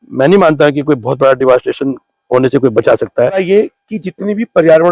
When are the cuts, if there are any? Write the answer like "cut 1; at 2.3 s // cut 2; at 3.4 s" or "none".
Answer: cut 1; at 3.4 s

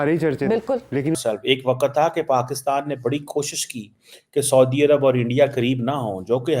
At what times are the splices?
cut 1; at 1.2 s

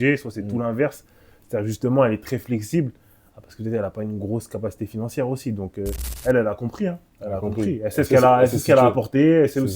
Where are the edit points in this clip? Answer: cut 1; at 6.0 s

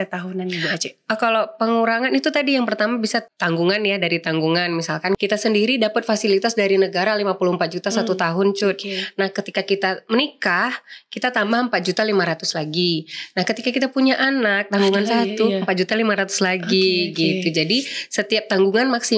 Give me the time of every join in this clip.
cut 1; at 3.3 s // cut 2; at 5.2 s

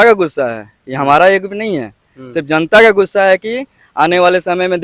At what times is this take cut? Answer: none

